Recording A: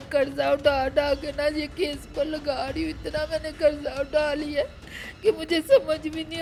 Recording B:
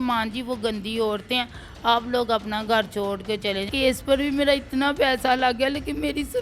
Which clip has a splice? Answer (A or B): B